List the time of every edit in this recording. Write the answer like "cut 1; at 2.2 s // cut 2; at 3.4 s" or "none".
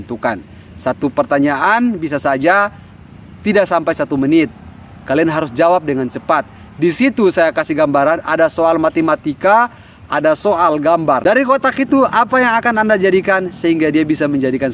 cut 1; at 11.2 s

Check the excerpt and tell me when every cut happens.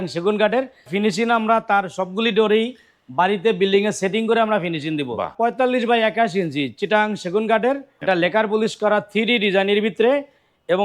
cut 1; at 0.9 s // cut 2; at 5.3 s // cut 3; at 7.9 s

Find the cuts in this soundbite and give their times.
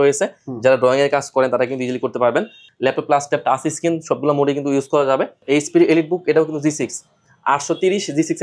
cut 1; at 2.6 s // cut 2; at 5.4 s

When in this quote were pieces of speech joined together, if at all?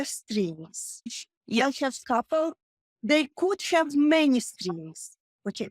cut 1; at 2.7 s

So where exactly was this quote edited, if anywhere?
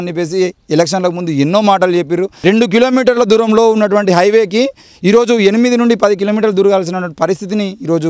cut 1; at 2.3 s

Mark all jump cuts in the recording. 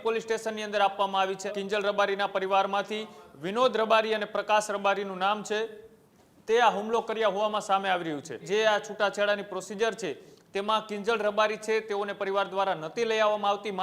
cut 1; at 1.5 s // cut 2; at 8.5 s

